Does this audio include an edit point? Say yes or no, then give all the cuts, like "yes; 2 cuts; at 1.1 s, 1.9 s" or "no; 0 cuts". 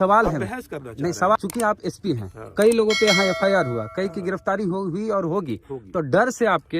yes; 1 cut; at 1.4 s